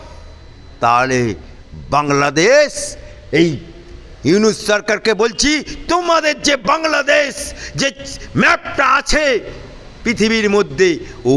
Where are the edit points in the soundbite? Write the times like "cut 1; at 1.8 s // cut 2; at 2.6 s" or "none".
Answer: none